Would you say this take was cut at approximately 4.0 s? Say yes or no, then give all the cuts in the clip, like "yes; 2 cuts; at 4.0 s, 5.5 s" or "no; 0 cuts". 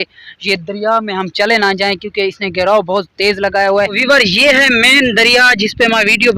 yes; 1 cut; at 4.0 s